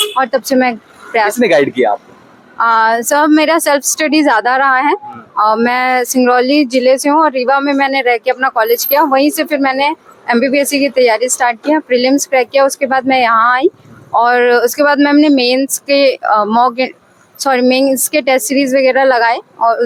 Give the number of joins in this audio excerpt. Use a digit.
0